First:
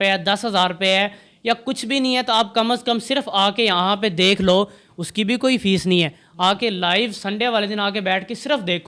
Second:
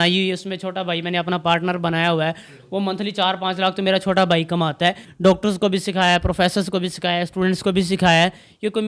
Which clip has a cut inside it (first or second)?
second